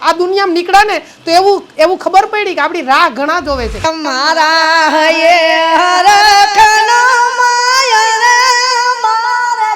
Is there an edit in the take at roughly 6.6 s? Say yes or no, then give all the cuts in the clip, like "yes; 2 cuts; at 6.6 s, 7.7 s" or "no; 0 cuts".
no; 1 cut; at 3.8 s